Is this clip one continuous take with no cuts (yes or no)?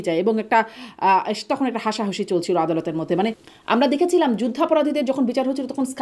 no